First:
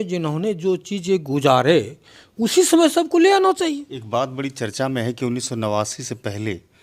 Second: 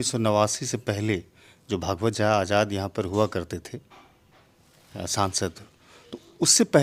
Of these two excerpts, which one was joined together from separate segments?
first; 1 cut; at 3.9 s

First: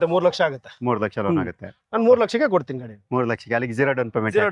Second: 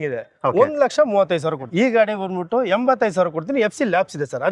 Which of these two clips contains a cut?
second; 1 cut; at 1.7 s

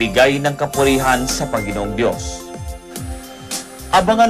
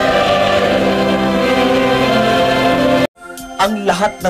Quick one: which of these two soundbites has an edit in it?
second; 1 cut; at 3.1 s

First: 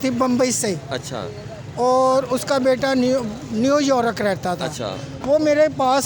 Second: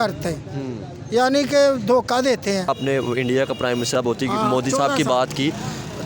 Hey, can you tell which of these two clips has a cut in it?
second; 2 cuts; at 2.7 s, 3.9 s

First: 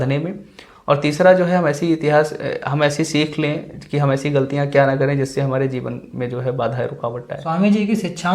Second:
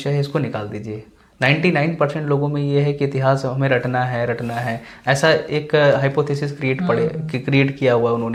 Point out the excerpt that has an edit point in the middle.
first; 1 cut; at 7.3 s

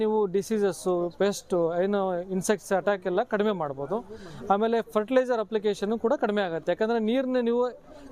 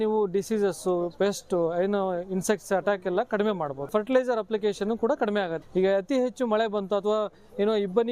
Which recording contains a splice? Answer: second; 2 cuts; at 3.9 s, 5.6 s

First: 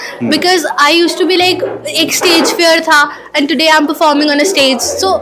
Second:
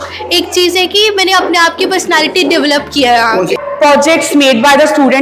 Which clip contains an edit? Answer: second; 1 cut; at 3.6 s

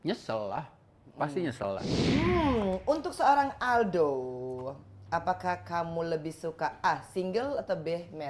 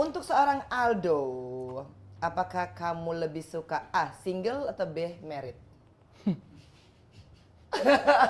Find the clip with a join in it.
first; 1 cut; at 1.9 s

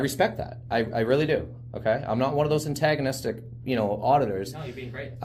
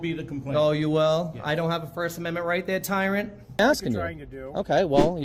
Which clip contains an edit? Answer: second; 1 cut; at 3.6 s

